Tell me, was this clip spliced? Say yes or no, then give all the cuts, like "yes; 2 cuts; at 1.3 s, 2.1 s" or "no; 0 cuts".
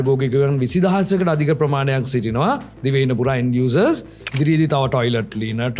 yes; 1 cut; at 4.3 s